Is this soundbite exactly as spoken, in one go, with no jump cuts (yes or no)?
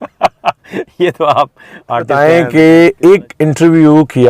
no